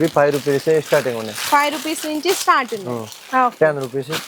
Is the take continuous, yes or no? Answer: yes